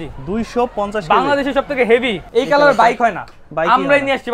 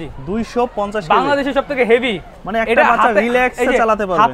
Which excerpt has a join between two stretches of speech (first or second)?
first